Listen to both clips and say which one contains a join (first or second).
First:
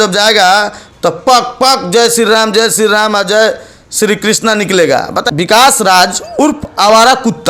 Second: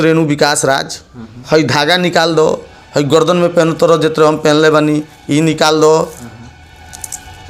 first